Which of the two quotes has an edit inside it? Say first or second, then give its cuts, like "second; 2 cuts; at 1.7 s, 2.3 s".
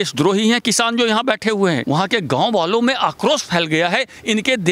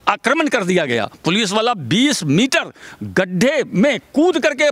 first; 1 cut; at 1.8 s